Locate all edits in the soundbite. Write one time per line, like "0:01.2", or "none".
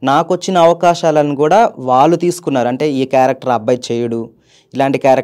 none